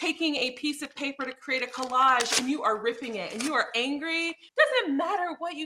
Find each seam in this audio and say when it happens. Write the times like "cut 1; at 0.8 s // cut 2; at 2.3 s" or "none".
cut 1; at 4.4 s